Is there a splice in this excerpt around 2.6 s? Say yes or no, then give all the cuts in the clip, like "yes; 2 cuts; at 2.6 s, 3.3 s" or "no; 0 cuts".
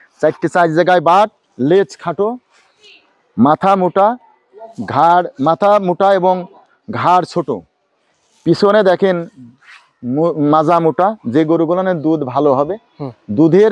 no; 0 cuts